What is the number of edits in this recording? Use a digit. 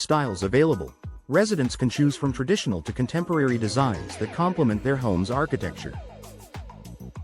1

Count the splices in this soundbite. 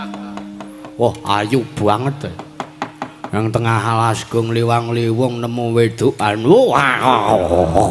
0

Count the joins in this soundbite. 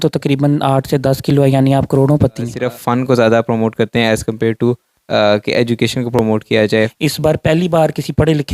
2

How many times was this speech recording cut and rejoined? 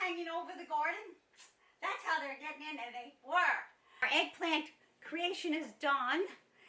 1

